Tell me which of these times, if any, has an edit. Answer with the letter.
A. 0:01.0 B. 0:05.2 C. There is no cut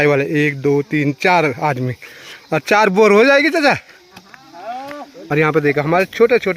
B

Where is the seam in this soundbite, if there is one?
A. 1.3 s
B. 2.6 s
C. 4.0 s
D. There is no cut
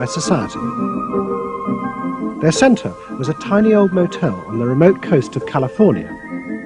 C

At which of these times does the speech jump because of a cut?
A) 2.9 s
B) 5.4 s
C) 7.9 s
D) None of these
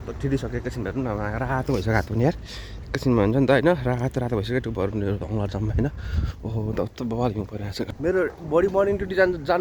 C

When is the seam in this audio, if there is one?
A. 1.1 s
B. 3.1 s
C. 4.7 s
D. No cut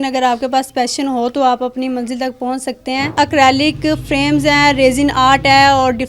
B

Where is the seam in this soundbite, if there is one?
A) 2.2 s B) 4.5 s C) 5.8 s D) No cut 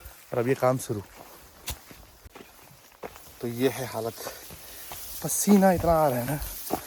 A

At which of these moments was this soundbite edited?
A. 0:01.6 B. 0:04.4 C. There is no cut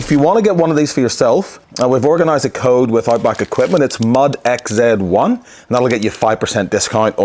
A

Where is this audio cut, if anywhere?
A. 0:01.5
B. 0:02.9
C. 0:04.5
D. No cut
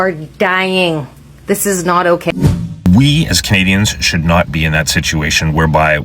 B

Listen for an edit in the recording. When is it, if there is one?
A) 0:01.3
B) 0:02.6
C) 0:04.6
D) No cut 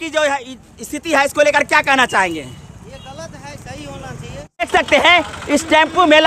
C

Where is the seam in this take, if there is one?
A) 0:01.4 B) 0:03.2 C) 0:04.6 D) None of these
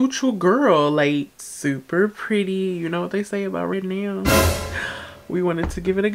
A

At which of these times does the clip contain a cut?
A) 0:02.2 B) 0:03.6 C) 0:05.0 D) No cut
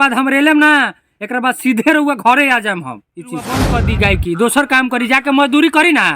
B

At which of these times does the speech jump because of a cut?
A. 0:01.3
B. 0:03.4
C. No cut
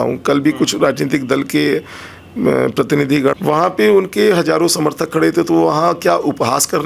B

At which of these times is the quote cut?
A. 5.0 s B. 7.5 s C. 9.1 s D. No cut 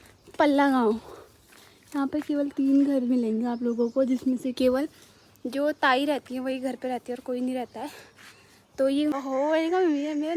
C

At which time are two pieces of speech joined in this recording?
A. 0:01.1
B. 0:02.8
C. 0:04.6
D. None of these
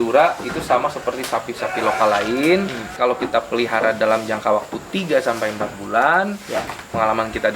B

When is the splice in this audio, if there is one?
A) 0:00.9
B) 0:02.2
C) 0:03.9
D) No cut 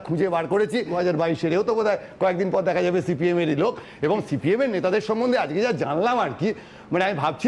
A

